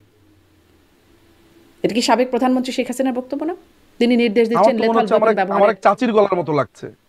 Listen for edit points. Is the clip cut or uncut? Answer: uncut